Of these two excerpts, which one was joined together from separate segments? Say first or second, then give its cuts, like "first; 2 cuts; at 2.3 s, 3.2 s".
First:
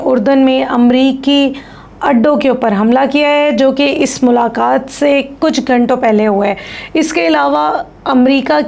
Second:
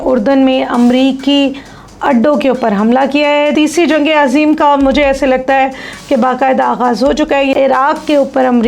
second; 2 cuts; at 3.5 s, 7.5 s